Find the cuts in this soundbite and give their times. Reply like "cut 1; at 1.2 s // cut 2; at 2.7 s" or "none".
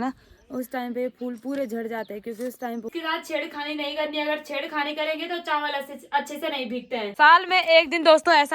cut 1; at 2.9 s // cut 2; at 7.1 s